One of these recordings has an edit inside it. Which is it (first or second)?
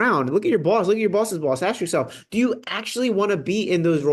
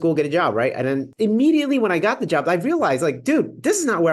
second